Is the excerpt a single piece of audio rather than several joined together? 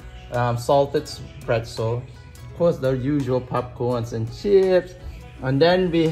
yes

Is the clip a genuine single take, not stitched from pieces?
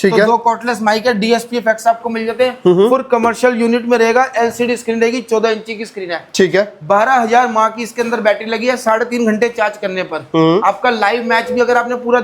yes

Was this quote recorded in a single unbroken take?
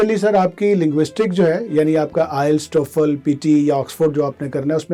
yes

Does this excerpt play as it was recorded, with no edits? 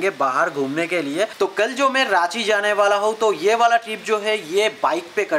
no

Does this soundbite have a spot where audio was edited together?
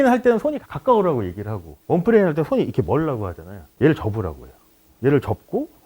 yes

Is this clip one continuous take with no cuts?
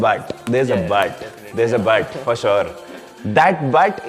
yes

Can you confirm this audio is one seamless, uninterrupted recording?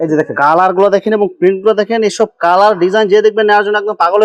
yes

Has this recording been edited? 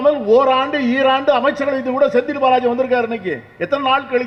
no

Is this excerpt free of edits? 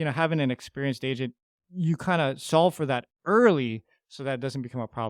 yes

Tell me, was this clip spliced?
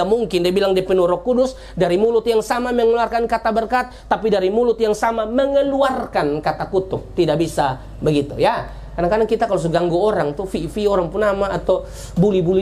no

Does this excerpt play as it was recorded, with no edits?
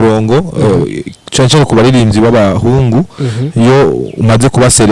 yes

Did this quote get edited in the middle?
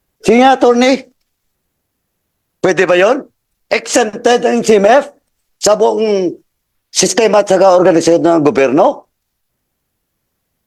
no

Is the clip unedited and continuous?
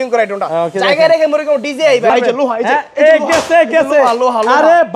no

